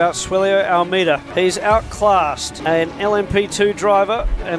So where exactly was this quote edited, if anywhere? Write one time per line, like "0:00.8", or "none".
0:01.3
0:02.5